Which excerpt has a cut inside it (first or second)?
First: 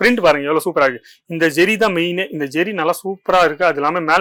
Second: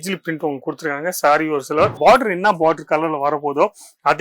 second